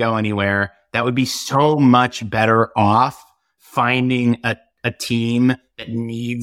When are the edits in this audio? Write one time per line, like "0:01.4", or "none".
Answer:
none